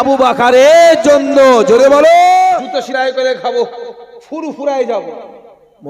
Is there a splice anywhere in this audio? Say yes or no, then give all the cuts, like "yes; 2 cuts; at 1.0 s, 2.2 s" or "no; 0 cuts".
yes; 1 cut; at 2.7 s